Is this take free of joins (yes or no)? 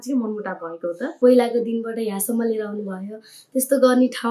no